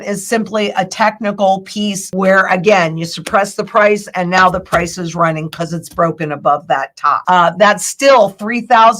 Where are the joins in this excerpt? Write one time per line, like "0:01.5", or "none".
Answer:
0:02.0
0:07.2